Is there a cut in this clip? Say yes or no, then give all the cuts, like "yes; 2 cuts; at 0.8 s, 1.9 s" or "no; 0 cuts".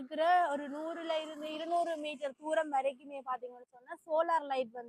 no; 0 cuts